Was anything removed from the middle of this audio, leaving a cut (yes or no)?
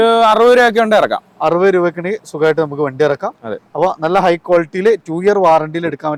no